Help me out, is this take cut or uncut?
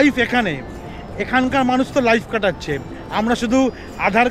uncut